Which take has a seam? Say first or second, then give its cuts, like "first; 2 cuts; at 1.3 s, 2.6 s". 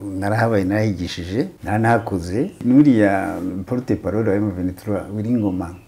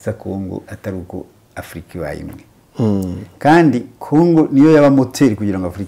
first; 2 cuts; at 1.6 s, 2.6 s